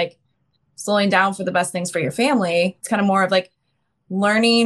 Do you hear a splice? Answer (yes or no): yes